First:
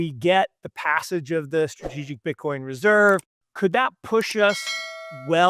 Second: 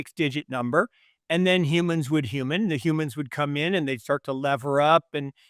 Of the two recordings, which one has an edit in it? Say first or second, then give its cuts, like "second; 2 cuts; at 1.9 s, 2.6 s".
first; 1 cut; at 3.4 s